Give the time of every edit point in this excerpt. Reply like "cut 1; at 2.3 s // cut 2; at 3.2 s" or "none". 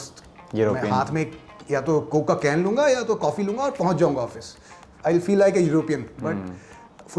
none